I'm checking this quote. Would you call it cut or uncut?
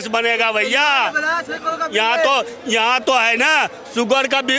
uncut